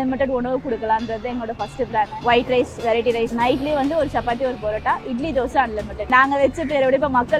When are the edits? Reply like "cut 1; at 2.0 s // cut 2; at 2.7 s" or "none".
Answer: cut 1; at 2.1 s // cut 2; at 3.3 s // cut 3; at 6.1 s